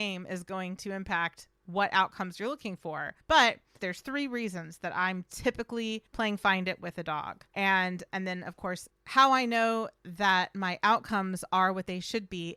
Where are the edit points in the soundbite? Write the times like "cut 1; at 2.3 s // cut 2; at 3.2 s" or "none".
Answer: cut 1; at 3.7 s